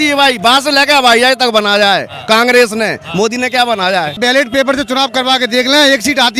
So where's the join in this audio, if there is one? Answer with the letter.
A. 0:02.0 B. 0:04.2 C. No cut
B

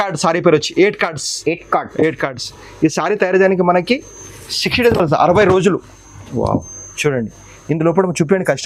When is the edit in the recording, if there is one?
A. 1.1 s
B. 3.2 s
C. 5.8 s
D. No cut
D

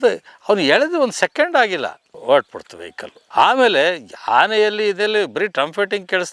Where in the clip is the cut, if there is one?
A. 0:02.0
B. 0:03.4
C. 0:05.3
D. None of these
D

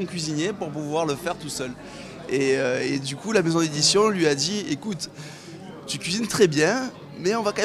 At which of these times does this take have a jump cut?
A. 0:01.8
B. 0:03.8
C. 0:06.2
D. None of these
B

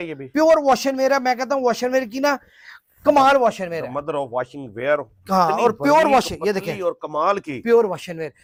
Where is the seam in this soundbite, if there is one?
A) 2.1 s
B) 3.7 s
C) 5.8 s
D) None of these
D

